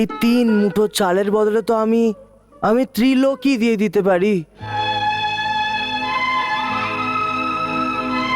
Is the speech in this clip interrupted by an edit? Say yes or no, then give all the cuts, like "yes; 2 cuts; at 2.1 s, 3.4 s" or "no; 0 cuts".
no; 0 cuts